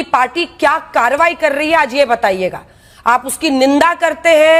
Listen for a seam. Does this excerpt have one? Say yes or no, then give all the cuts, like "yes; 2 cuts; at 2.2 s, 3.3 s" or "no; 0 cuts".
no; 0 cuts